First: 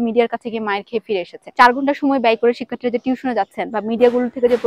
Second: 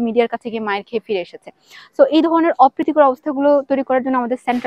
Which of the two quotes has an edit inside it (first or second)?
first